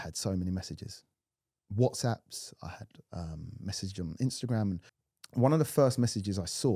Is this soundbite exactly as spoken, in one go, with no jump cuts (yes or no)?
no